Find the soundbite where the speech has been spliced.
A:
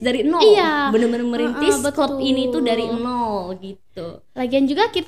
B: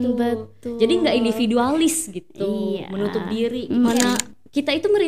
B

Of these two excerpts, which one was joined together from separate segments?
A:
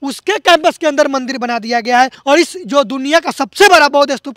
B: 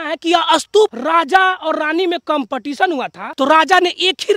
B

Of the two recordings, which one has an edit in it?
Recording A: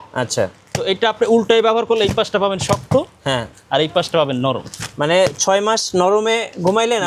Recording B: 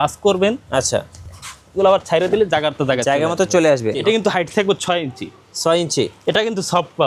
B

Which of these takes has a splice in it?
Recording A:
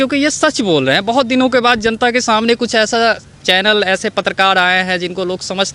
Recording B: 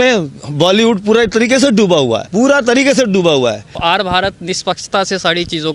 B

